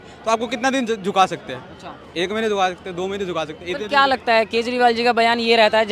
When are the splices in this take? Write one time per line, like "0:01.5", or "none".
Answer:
none